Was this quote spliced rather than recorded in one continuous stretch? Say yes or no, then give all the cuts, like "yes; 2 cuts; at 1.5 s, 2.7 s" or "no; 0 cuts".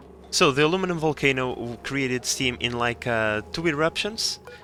no; 0 cuts